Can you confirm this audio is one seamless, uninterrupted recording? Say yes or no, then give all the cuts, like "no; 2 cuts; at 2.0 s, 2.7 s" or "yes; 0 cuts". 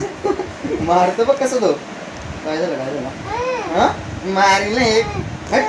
yes; 0 cuts